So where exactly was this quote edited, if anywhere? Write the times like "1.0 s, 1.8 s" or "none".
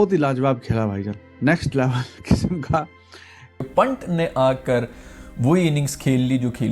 3.6 s